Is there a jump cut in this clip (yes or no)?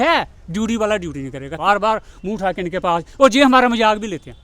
yes